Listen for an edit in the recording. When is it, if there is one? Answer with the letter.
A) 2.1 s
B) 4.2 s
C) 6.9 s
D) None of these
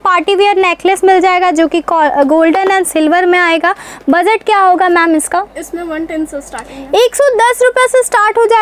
D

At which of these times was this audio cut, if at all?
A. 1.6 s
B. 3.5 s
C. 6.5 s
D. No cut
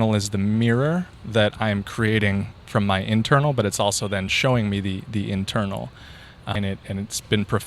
C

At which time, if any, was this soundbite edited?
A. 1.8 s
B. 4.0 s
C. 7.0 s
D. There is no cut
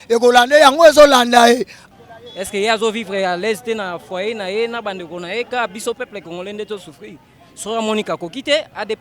A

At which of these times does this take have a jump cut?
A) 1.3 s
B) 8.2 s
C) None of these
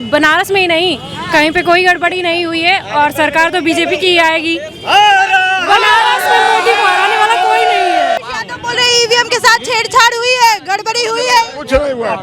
B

